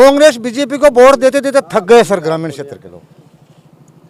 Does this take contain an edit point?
no; 0 cuts

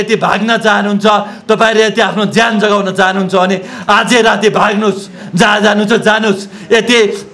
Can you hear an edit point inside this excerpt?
no; 0 cuts

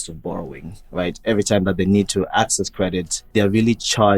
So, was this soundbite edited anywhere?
yes; 1 cut; at 3.1 s

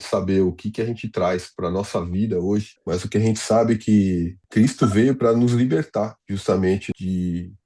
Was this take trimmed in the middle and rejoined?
yes; 4 cuts; at 2.8 s, 4.4 s, 6.2 s, 6.9 s

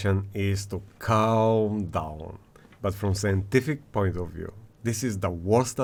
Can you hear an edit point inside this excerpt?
no; 0 cuts

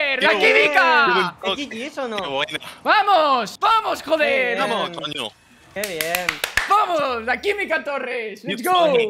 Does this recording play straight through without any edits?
no; 1 cut; at 3.5 s

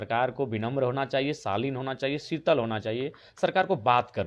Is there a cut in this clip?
no; 0 cuts

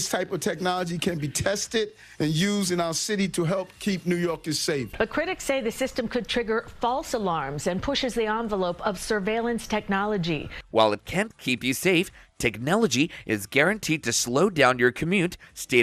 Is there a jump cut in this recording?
no; 0 cuts

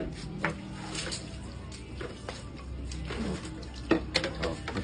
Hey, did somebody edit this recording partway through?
no; 0 cuts

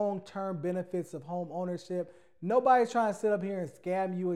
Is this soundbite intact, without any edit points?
yes; 0 cuts

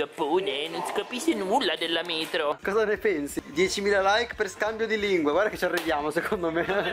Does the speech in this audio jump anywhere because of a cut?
yes; 1 cut; at 2.6 s

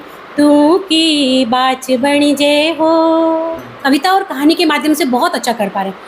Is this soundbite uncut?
no; 1 cut; at 3.7 s

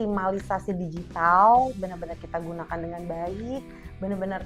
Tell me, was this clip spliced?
no; 0 cuts

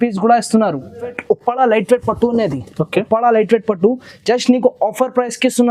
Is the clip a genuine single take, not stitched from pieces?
no; 1 cut; at 1.2 s

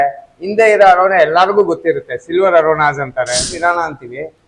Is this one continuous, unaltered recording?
no; 1 cut; at 3.5 s

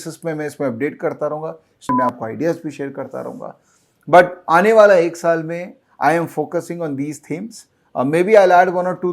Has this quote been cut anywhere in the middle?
yes; 1 cut; at 1.9 s

